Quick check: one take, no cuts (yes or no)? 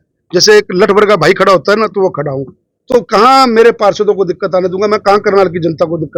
yes